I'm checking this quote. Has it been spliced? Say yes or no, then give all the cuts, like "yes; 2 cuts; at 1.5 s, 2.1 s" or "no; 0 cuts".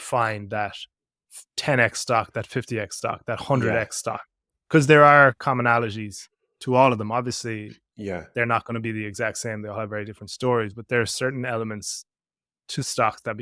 no; 0 cuts